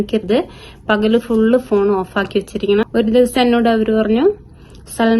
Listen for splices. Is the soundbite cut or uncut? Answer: cut